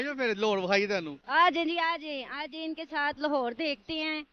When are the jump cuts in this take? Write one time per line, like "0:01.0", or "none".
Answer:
none